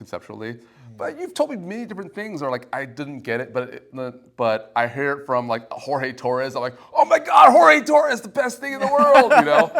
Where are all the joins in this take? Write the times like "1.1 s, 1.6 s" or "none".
none